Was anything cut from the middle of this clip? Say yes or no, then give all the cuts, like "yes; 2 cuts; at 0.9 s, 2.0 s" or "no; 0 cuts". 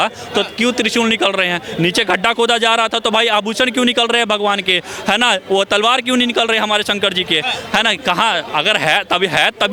no; 0 cuts